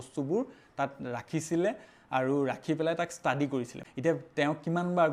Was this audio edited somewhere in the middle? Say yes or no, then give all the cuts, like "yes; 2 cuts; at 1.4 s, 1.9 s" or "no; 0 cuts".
no; 0 cuts